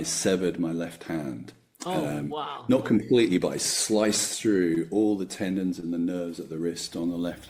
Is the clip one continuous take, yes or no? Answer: yes